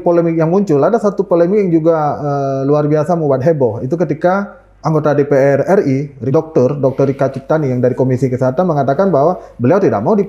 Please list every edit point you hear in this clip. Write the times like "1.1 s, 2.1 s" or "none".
6.2 s

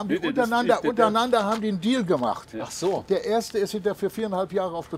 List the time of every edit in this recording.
none

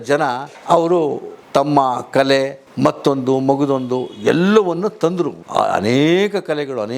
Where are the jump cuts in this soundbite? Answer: 5.4 s

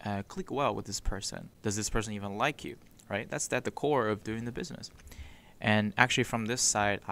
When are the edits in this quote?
none

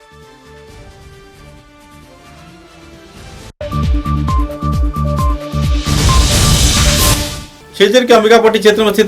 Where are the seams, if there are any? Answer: 7.3 s

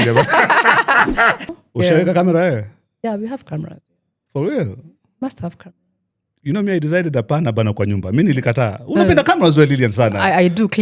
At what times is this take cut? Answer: 1.5 s

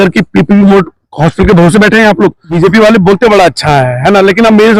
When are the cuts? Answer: 2.5 s

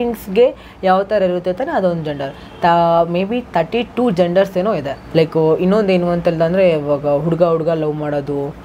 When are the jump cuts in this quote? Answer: 5.0 s

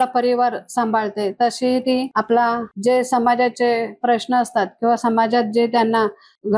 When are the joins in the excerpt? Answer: 2.1 s, 2.7 s

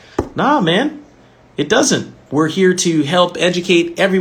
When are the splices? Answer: 2.2 s

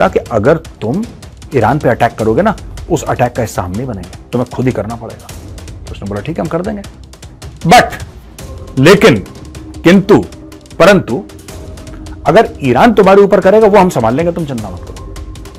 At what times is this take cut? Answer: none

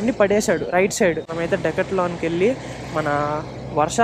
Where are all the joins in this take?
1.2 s

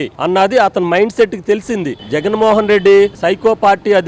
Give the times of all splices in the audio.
2.0 s

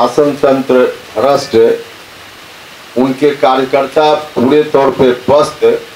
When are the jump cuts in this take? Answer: none

